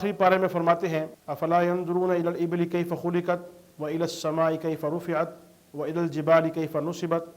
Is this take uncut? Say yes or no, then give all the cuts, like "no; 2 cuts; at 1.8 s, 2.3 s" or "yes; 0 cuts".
no; 1 cut; at 1.2 s